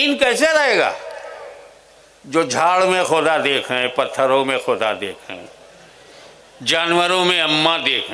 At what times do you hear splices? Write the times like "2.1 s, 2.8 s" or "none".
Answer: none